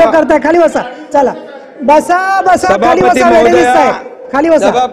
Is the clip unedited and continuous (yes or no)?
yes